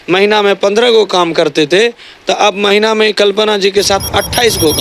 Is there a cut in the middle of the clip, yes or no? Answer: no